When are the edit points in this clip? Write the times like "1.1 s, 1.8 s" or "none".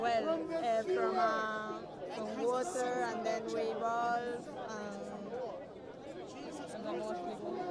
none

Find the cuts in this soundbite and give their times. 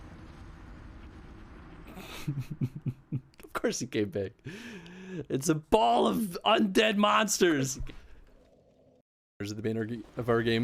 9.2 s

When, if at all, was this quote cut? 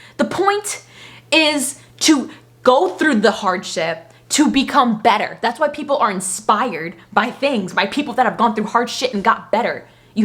none

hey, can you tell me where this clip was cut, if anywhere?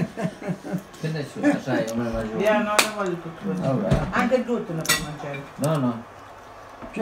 none

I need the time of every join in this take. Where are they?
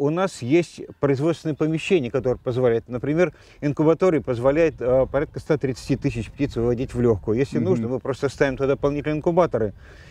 none

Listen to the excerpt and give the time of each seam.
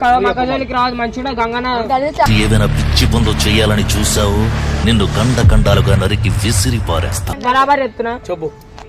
7.4 s

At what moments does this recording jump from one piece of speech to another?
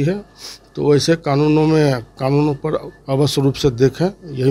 none

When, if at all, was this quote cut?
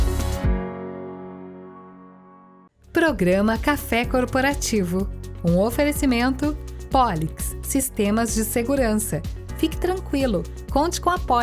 2.2 s

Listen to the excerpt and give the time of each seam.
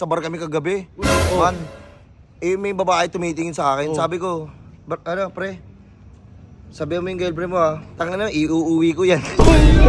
none

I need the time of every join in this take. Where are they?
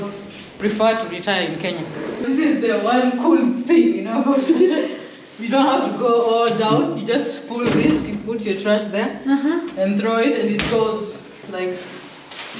2.2 s

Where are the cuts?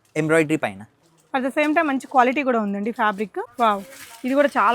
3.4 s

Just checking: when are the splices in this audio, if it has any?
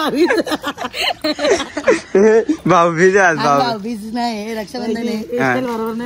1.3 s

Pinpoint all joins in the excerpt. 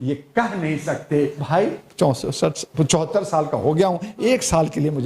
1.4 s

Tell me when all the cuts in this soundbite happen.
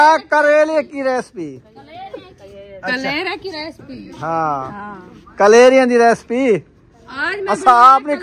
none

